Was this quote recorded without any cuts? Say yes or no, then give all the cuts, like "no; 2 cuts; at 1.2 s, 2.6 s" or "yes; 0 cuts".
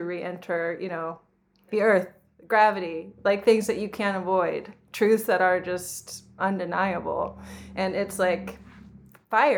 no; 2 cuts; at 1.7 s, 6.3 s